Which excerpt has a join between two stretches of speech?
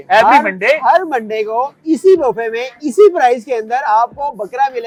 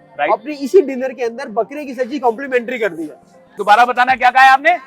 second; 1 cut; at 3.6 s

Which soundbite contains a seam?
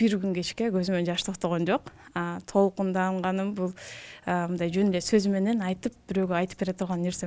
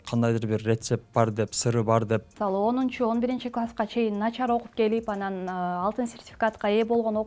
second; 1 cut; at 2.3 s

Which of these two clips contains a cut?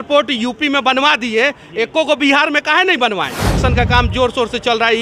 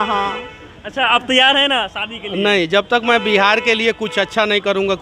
first; 1 cut; at 3.6 s

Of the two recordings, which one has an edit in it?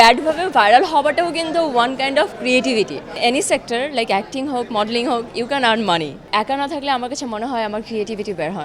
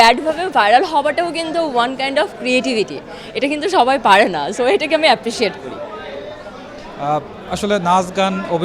first; 2 cuts; at 3.1 s, 6.3 s

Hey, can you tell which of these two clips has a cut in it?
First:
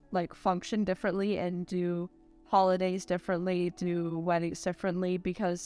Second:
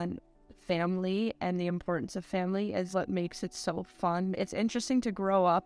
second; 2 cuts; at 2.9 s, 4.3 s

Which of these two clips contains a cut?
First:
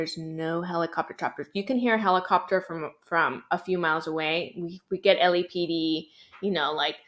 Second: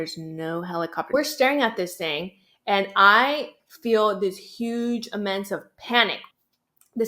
second; 2 cuts; at 1.1 s, 6.2 s

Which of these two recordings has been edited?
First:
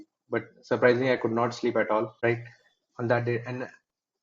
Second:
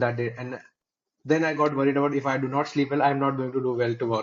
first; 1 cut; at 2.1 s

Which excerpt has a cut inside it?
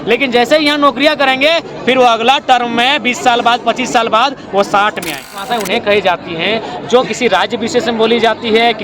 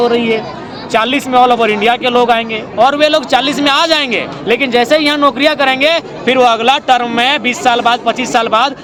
first; 1 cut; at 5.5 s

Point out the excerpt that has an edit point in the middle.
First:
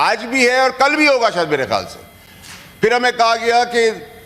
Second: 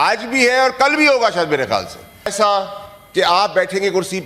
second; 1 cut; at 2.3 s

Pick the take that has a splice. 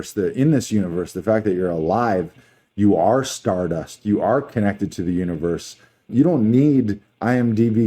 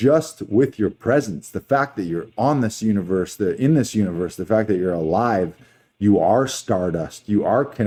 first; 1 cut; at 6.1 s

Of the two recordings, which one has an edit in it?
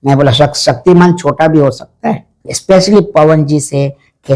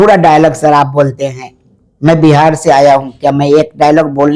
first; 1 cut; at 2.5 s

